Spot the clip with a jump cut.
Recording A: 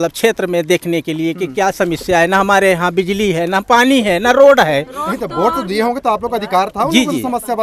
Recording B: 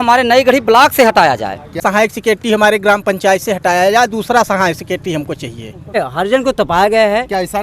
B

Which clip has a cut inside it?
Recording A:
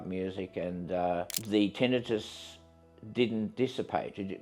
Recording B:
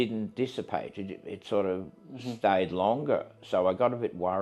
A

